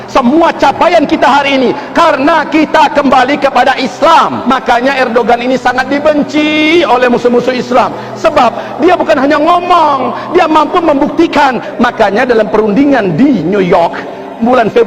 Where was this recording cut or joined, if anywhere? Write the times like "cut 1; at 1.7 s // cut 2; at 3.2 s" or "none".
cut 1; at 4.4 s // cut 2; at 11.6 s